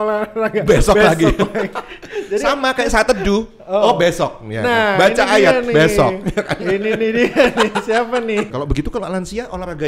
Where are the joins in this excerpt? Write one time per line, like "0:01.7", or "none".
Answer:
0:08.5